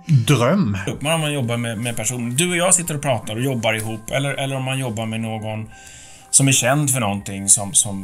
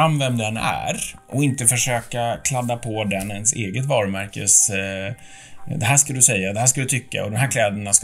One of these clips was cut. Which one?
first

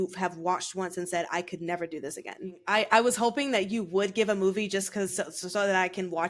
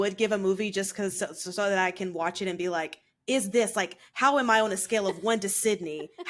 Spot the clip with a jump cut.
first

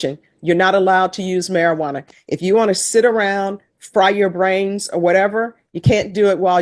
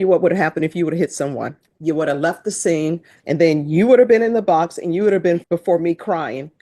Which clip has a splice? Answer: second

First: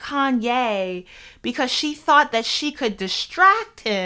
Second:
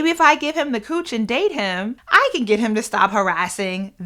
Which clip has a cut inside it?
second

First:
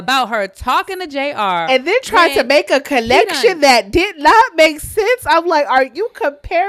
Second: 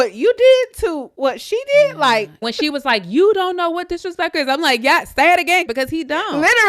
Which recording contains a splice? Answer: second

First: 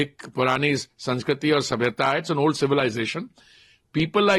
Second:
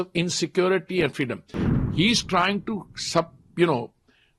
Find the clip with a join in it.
second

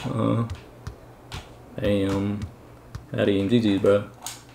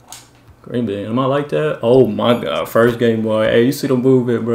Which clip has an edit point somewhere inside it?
second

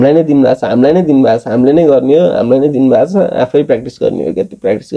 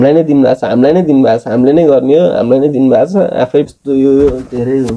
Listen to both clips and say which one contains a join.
second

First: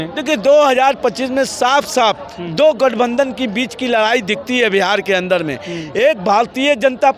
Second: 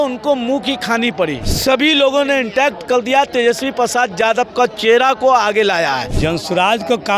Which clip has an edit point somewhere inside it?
second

